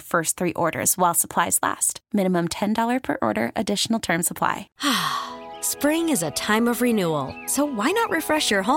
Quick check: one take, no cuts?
no; 1 cut; at 4.7 s

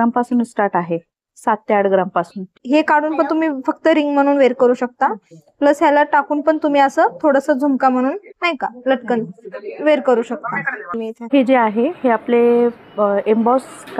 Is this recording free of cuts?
no; 2 cuts; at 2.6 s, 11.1 s

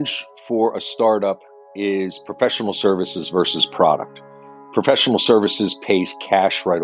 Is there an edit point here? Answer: no; 0 cuts

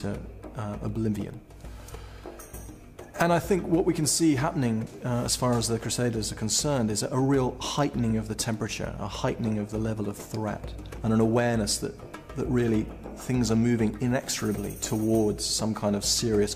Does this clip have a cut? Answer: yes; 1 cut; at 5.1 s

